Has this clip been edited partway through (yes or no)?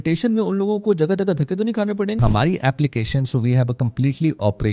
yes